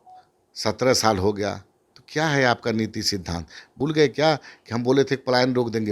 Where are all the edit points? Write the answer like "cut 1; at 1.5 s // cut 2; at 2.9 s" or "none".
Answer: cut 1; at 3.7 s

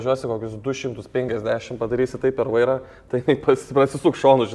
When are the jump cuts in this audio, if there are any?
none

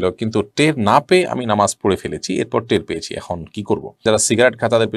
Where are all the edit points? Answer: cut 1; at 4.0 s

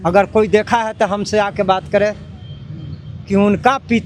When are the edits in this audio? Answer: none

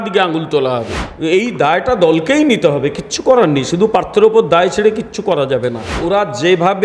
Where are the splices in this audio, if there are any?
cut 1; at 1.0 s // cut 2; at 6.0 s

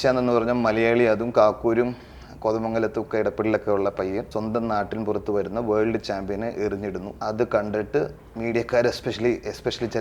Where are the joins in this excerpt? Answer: cut 1; at 4.3 s // cut 2; at 7.1 s

